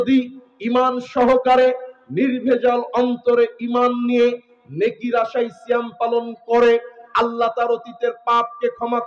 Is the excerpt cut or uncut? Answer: uncut